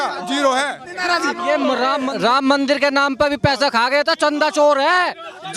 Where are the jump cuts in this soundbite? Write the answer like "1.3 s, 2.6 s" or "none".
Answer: 2.0 s

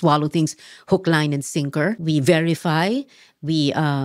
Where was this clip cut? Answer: 2.0 s

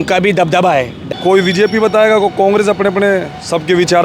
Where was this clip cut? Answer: 1.1 s

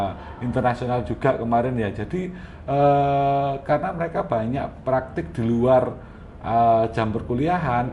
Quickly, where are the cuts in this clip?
none

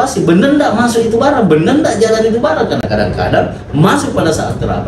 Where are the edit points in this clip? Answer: none

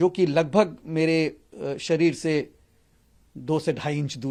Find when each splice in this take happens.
none

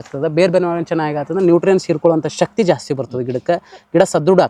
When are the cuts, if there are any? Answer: none

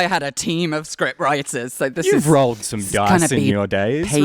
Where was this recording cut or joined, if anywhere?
none

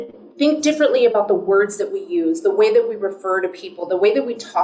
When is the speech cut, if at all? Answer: none

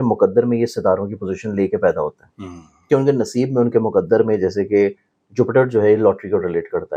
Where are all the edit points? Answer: none

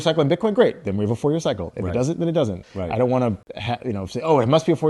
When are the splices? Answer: 2.7 s, 3.5 s

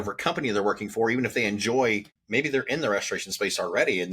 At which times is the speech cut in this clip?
2.1 s

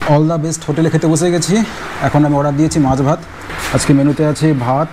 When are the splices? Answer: none

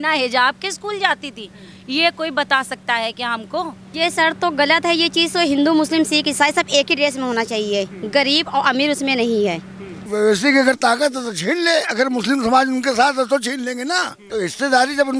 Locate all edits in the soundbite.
3.8 s, 10.0 s, 14.2 s

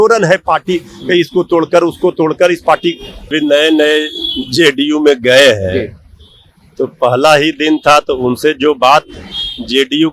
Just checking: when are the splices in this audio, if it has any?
3.3 s

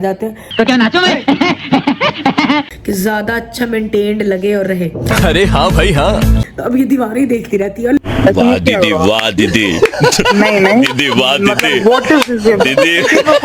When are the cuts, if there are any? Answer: 2.7 s, 6.4 s

